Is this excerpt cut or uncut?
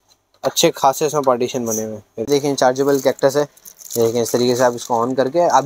cut